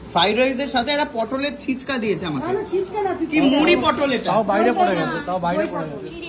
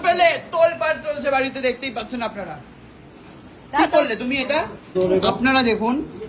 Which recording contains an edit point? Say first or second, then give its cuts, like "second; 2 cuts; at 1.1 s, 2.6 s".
second; 1 cut; at 4.8 s